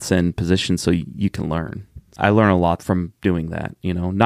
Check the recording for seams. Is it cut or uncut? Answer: uncut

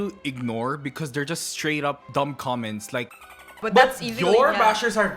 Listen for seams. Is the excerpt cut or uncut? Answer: cut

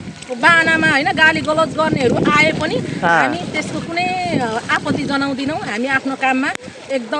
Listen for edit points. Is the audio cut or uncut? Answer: uncut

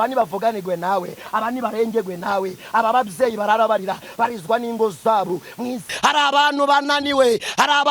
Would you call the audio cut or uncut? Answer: cut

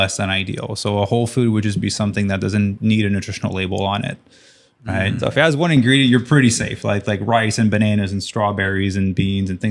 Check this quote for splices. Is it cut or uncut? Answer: cut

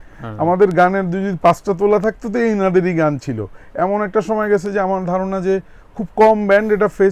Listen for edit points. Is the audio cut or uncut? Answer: uncut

